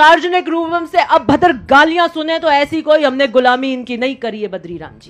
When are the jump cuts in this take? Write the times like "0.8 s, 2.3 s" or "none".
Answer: none

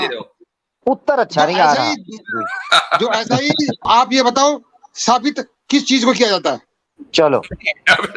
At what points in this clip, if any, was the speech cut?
3.8 s, 5.5 s

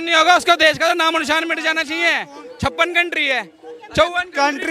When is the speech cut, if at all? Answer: 2.4 s

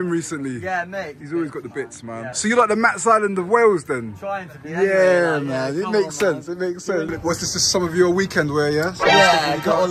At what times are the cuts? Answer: 1.1 s, 2.3 s, 7.1 s

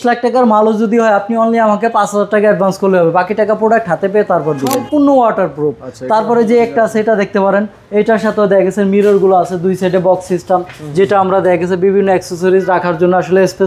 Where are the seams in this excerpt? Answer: 4.8 s

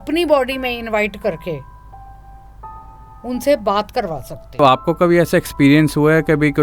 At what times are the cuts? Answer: 4.6 s

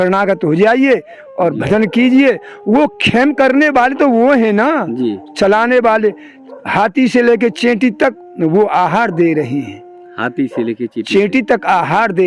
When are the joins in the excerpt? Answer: none

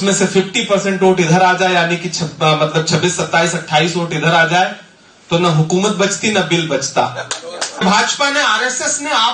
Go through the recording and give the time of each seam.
7.8 s

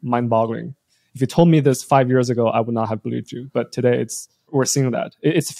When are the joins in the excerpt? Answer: 4.5 s

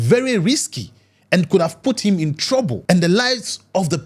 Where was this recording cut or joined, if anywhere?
2.8 s

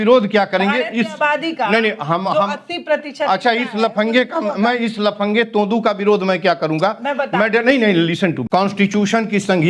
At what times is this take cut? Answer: 8.4 s

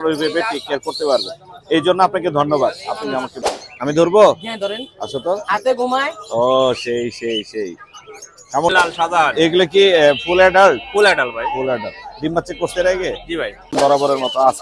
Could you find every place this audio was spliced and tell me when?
3.3 s, 8.7 s, 13.7 s

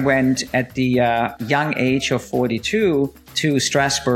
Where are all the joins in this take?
1.4 s, 3.2 s

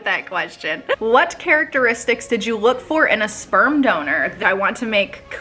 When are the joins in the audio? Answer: 0.9 s, 4.4 s

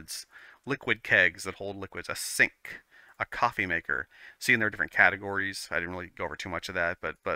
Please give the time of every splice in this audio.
none

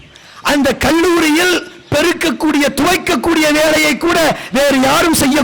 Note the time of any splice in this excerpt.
none

